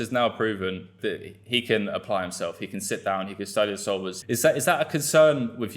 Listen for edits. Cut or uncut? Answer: cut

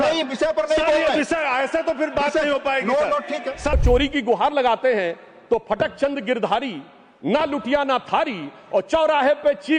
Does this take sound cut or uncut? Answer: cut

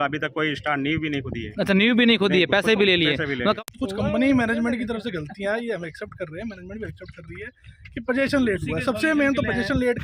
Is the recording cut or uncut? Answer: cut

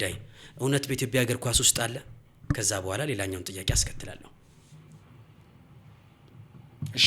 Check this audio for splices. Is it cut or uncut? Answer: uncut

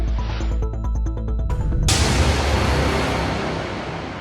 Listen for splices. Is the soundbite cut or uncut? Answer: cut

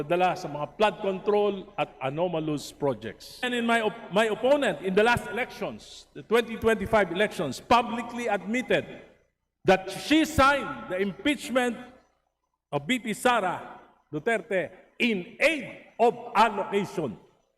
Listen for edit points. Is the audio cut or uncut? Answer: cut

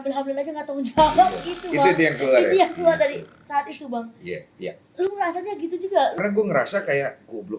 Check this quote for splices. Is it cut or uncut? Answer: uncut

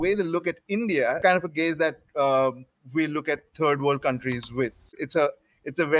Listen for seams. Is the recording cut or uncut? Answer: cut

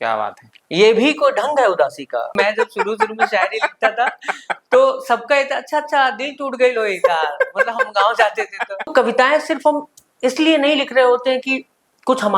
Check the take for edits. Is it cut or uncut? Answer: cut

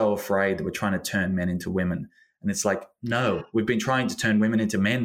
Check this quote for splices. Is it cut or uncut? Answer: uncut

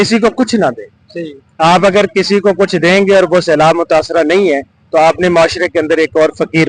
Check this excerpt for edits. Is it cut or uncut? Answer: uncut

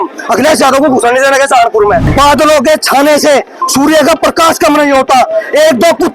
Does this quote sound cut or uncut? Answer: cut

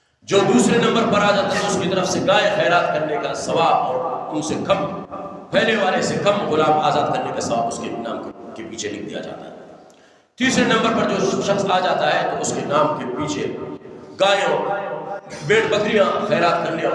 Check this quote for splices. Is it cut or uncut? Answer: uncut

